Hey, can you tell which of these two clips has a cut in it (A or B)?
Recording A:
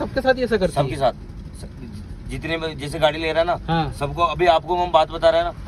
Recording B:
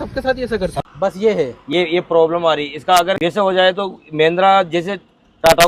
B